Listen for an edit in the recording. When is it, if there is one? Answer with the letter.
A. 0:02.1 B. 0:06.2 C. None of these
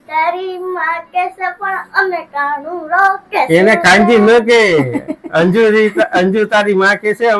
C